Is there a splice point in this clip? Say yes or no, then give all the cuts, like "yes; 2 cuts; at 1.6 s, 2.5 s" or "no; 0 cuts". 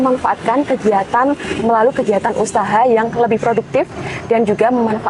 no; 0 cuts